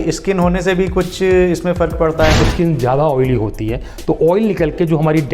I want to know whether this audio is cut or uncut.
cut